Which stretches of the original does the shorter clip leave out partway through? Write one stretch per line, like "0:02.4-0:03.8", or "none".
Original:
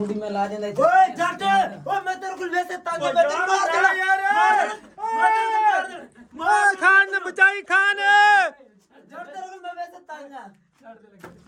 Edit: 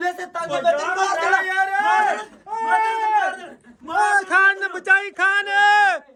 none